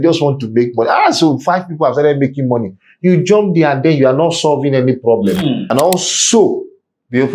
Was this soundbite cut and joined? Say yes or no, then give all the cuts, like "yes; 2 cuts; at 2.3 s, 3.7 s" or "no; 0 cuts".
yes; 1 cut; at 5.6 s